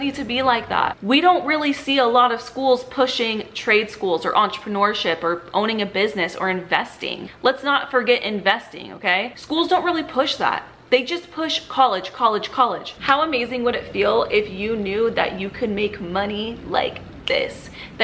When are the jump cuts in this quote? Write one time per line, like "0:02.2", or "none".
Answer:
0:00.9
0:07.2
0:12.9